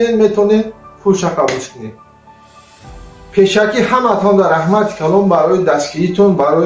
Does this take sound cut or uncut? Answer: cut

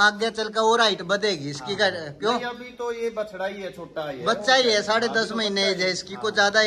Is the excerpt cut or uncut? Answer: uncut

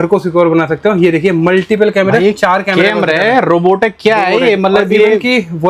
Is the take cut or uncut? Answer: uncut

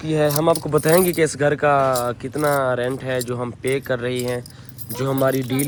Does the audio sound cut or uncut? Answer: uncut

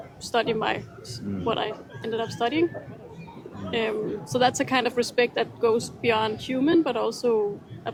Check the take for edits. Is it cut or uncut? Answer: uncut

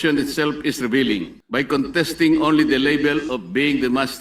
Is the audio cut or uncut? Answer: cut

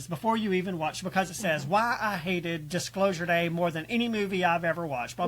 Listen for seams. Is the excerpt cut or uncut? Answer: uncut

